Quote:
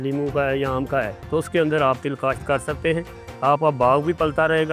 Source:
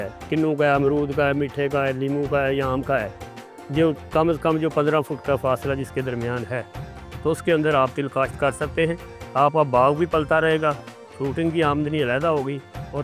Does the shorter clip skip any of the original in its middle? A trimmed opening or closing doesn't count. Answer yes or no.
yes